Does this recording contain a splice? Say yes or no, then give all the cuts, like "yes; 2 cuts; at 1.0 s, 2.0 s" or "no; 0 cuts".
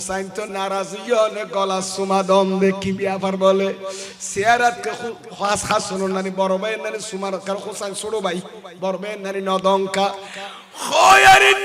no; 0 cuts